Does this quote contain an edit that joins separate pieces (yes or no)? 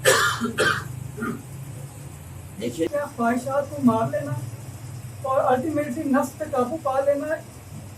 yes